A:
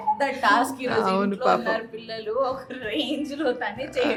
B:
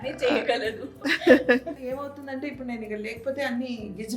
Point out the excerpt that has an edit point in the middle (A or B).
B